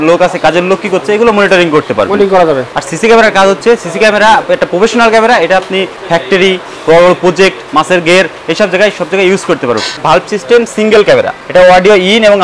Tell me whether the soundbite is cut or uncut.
cut